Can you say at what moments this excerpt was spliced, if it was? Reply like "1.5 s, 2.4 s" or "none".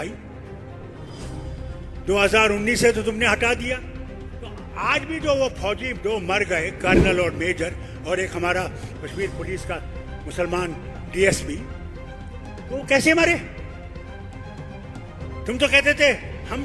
none